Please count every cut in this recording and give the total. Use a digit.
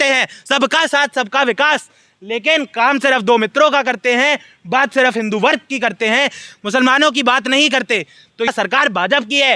1